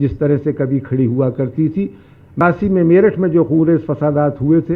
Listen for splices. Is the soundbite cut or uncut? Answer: cut